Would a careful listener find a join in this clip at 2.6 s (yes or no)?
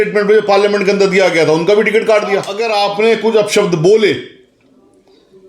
yes